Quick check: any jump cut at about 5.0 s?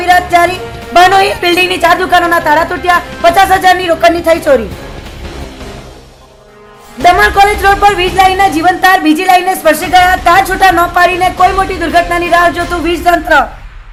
no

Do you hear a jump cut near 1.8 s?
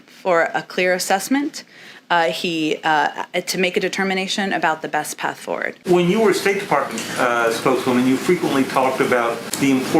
no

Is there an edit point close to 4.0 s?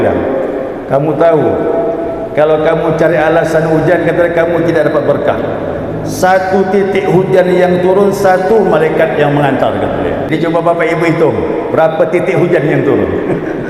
no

